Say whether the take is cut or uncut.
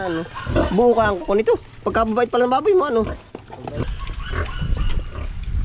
cut